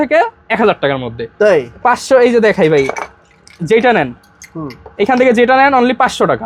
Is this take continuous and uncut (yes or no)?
yes